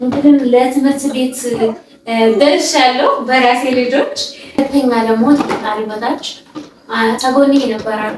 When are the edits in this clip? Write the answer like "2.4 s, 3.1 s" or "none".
4.6 s